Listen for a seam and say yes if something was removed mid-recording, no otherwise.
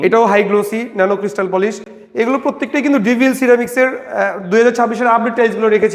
no